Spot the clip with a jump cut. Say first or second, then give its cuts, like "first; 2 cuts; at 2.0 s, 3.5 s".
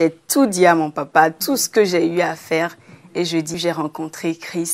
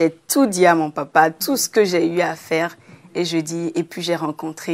first; 1 cut; at 3.5 s